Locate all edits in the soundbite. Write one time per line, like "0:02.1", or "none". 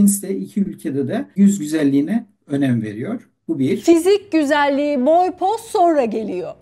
0:01.3